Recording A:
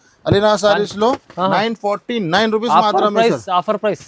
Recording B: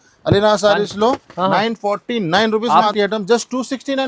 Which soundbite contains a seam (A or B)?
B